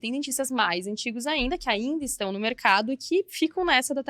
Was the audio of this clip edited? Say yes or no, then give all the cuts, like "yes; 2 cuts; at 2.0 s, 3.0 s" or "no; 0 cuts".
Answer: no; 0 cuts